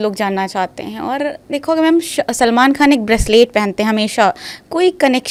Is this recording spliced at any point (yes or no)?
no